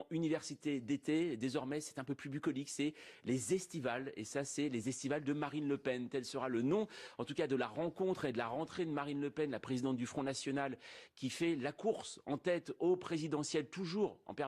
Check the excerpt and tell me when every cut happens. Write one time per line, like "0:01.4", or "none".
0:10.0